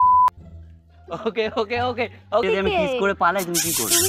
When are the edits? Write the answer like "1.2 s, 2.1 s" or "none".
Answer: 2.4 s